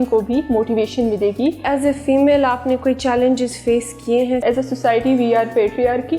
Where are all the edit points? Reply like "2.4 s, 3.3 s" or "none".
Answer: 1.6 s, 4.4 s

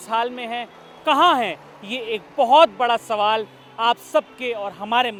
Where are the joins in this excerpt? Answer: none

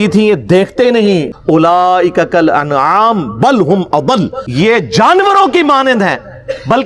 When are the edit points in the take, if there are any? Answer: 1.3 s, 4.4 s

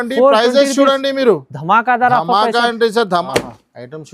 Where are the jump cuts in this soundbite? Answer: 3.2 s

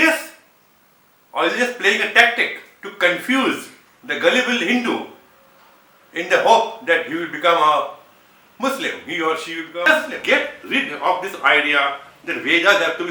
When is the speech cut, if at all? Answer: 9.8 s

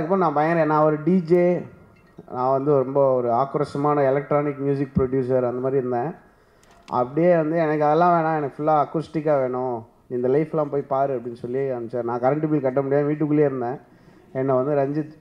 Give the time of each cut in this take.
none

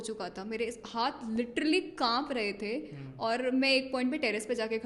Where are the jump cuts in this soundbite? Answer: none

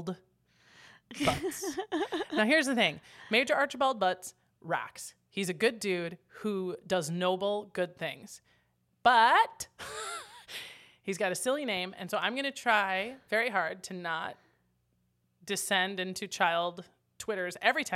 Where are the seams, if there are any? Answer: none

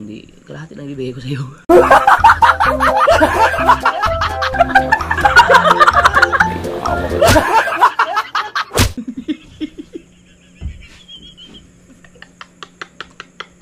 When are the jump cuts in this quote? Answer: none

